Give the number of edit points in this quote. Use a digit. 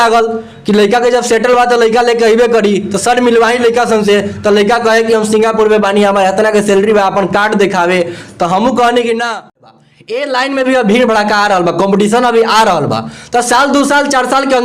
1